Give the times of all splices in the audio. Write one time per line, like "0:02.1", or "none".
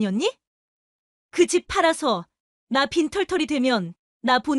none